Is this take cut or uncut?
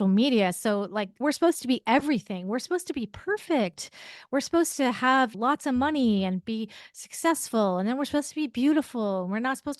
cut